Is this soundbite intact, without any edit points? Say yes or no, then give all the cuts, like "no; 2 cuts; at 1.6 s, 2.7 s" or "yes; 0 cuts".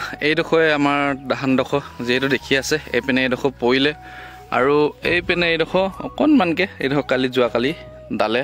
yes; 0 cuts